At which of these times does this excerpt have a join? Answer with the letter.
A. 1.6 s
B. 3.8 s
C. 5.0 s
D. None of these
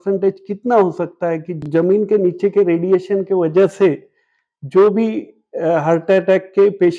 A